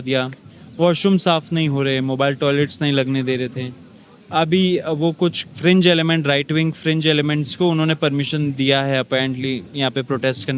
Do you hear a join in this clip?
no; 0 cuts

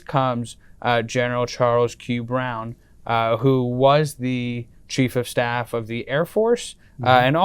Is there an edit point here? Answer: no; 0 cuts

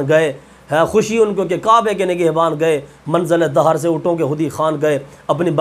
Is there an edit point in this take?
no; 0 cuts

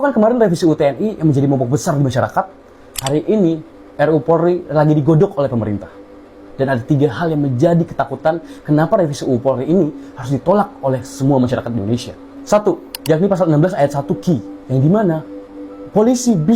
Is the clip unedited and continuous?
yes; 0 cuts

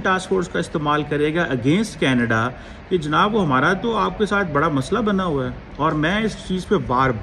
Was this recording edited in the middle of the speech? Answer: no; 0 cuts

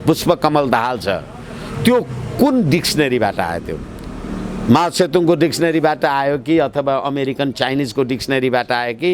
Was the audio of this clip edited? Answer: no; 0 cuts

